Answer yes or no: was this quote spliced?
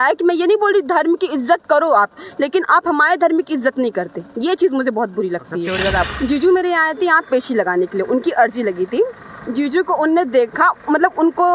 yes